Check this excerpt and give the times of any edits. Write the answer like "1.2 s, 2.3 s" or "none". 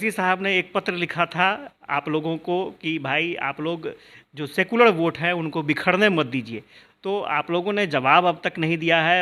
none